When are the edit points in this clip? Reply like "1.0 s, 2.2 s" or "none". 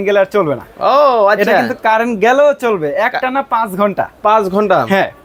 none